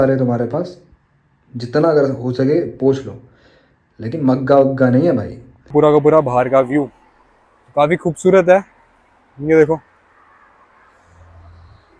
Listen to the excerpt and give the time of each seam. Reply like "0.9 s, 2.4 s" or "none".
5.7 s